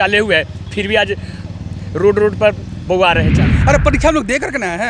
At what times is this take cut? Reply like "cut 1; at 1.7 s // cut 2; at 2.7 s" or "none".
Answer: cut 1; at 3.4 s